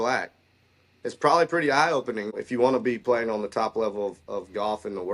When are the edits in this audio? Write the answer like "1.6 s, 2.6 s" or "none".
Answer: 2.4 s